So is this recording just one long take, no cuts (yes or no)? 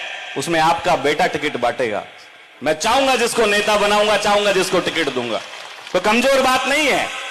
yes